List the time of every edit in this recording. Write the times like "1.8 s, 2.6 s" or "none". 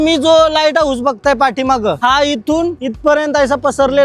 none